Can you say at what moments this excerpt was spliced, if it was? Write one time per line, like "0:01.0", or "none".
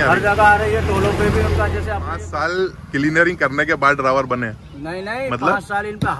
0:02.2